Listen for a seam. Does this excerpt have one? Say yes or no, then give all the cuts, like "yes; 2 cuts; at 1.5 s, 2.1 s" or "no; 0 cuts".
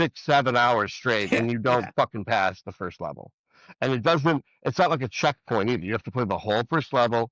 no; 0 cuts